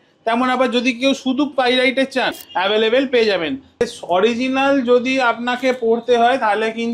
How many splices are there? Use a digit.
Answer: 2